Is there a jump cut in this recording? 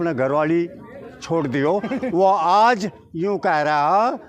no; 0 cuts

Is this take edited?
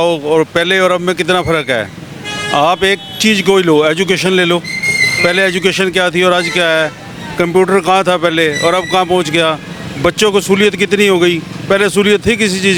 no; 0 cuts

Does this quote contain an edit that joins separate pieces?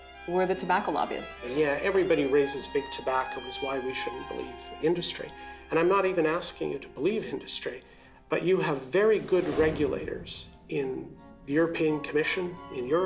yes; 1 cut; at 1.4 s

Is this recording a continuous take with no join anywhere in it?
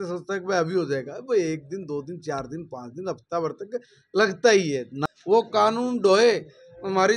no; 1 cut; at 4.9 s

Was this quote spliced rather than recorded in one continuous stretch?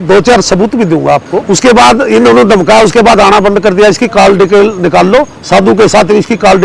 yes; 1 cut; at 1.4 s

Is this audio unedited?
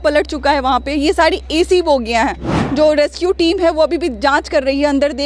no; 1 cut; at 2.5 s

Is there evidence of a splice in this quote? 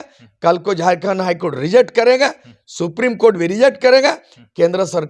no; 0 cuts

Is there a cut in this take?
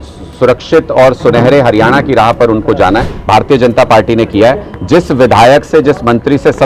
yes; 1 cut; at 3.1 s

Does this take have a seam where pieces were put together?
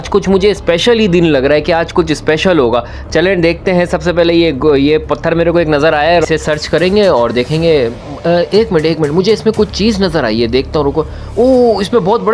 no; 0 cuts

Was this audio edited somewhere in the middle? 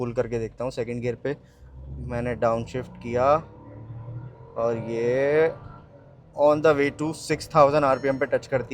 no; 0 cuts

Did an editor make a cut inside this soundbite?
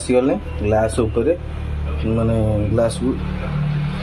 no; 0 cuts

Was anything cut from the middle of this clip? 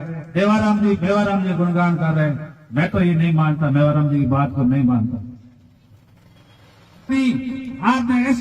yes; 1 cut; at 7.0 s

